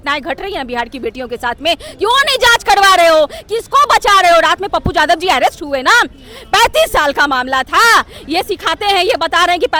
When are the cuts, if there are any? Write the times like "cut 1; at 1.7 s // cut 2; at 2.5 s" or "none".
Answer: none